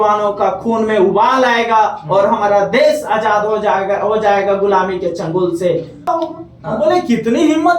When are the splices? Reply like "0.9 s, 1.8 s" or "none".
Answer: 6.0 s